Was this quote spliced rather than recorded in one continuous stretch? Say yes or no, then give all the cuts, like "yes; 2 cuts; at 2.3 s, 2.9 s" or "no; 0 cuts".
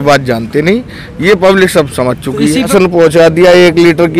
yes; 1 cut; at 2.7 s